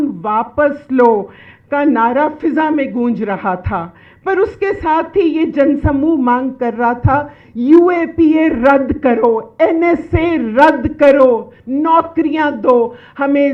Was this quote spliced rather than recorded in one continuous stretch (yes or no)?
no